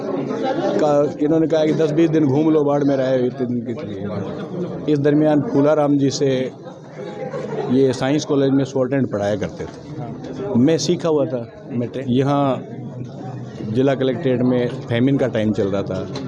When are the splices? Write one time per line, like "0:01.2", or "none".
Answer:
0:11.9